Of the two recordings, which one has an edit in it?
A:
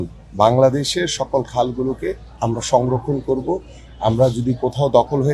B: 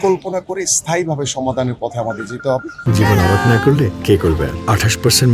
B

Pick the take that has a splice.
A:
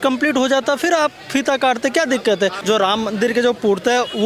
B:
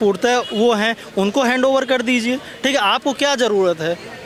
A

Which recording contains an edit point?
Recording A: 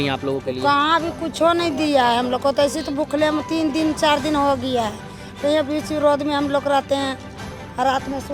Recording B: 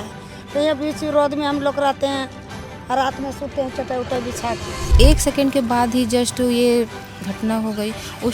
B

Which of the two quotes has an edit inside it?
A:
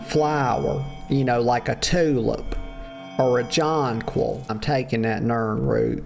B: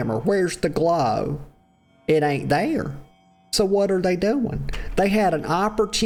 A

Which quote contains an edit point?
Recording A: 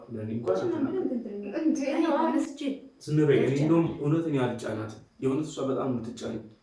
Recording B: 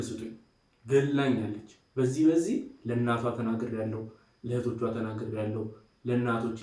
A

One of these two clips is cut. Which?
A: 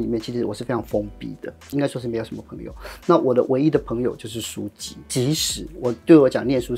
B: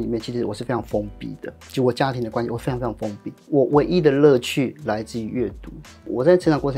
A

